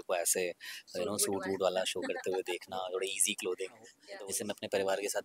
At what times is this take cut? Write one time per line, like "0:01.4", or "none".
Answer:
0:04.0